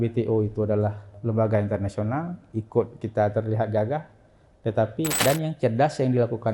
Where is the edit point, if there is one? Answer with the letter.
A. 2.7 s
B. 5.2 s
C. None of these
B